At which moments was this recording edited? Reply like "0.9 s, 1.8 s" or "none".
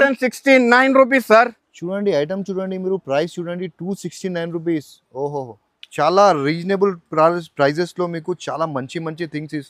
none